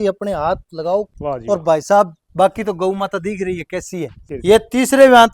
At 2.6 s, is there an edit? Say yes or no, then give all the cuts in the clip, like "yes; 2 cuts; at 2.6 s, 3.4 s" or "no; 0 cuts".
no; 2 cuts; at 1.1 s, 4.2 s